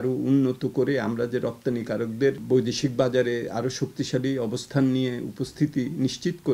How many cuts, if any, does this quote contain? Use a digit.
1